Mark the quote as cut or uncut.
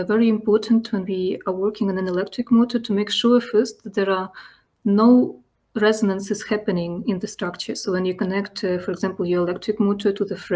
uncut